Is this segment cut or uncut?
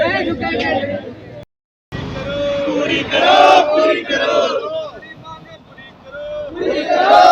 uncut